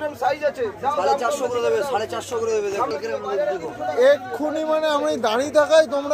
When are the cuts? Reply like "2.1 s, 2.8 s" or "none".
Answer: none